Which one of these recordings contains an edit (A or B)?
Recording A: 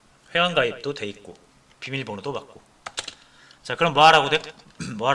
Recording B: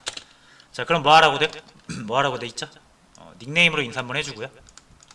A